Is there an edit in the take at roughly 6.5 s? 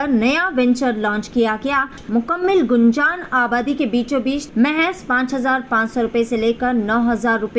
no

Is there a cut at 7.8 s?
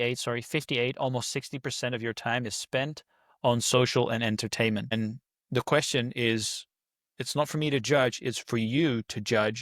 no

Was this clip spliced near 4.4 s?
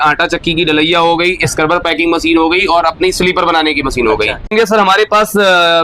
yes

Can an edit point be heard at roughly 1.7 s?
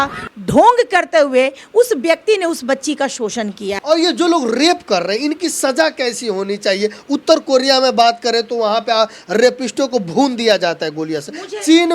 no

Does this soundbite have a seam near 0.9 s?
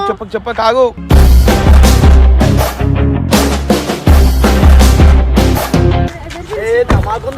no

